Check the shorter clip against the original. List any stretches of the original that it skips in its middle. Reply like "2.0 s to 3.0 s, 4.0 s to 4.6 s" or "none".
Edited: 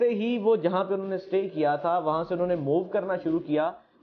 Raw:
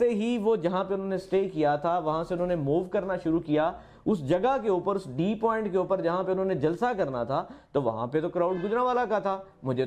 none